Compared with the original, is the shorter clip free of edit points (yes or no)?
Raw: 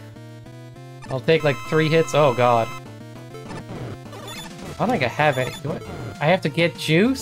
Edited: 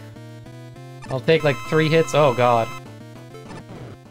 yes